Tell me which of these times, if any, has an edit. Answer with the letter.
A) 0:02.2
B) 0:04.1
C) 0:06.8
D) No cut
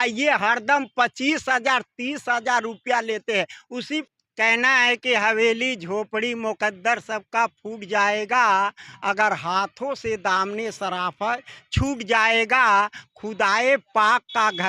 B